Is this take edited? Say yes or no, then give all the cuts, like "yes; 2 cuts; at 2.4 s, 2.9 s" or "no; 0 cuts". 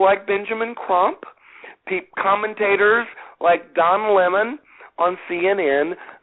no; 0 cuts